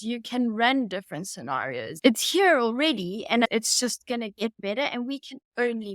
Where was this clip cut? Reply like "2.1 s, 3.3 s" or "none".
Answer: 2.0 s, 3.5 s